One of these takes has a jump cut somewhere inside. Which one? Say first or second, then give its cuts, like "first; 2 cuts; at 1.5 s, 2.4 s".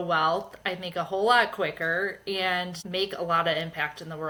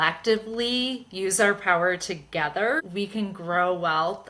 second; 1 cut; at 2.8 s